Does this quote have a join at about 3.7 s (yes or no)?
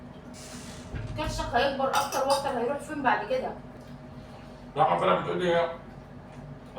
yes